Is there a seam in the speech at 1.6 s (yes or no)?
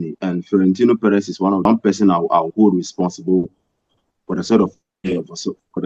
yes